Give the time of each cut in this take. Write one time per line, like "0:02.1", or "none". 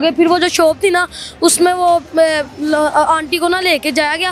none

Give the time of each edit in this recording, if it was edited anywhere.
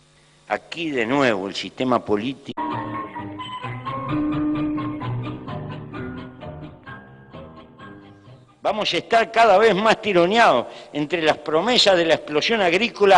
none

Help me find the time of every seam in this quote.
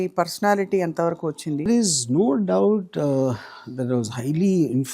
0:01.7

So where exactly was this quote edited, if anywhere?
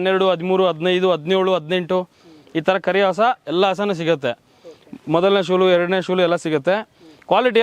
none

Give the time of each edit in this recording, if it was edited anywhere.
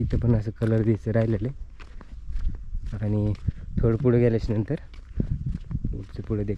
none

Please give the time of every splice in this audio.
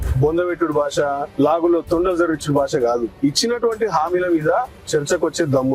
0:01.3
0:03.1

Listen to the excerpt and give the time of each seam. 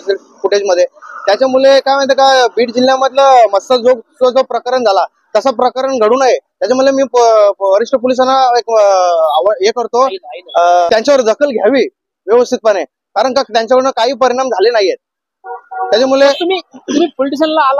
none

